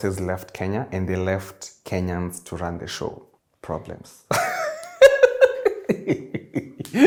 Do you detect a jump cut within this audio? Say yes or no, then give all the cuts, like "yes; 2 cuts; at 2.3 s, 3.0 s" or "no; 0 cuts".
no; 0 cuts